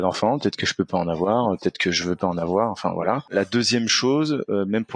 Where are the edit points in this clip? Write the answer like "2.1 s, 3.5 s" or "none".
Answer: 3.3 s

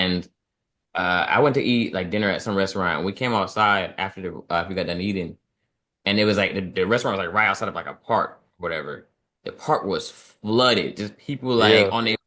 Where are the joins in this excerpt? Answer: none

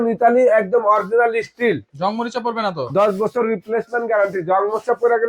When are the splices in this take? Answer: 1.9 s

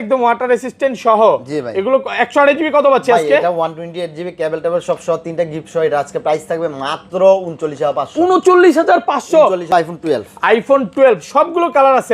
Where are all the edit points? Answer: 9.6 s

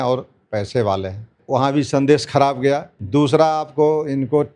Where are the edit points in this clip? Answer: 1.4 s, 2.9 s

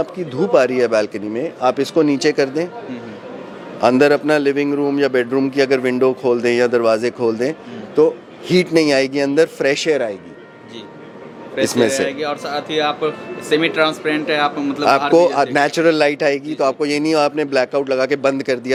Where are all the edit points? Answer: none

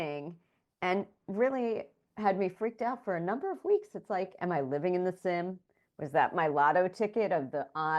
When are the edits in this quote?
none

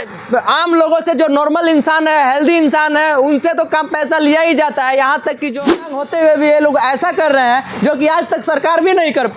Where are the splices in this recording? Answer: 5.9 s

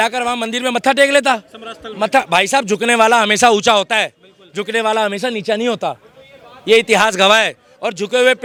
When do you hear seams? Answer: none

